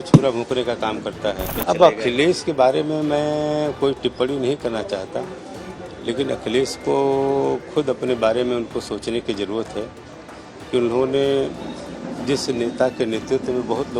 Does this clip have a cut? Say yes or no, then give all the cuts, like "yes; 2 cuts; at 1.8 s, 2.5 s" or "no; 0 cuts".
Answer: yes; 1 cut; at 1.5 s